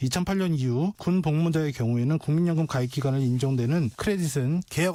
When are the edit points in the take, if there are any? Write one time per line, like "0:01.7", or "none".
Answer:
none